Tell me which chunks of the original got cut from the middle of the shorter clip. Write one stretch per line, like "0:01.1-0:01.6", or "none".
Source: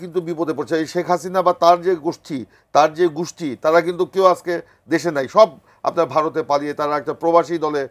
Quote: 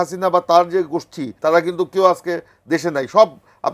0:02.4-0:03.4